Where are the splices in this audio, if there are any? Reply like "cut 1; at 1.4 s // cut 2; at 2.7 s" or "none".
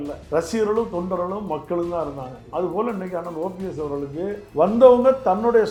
none